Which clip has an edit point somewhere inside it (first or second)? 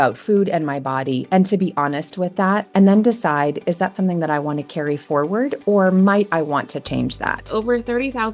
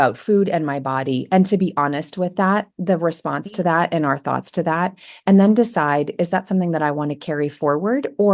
first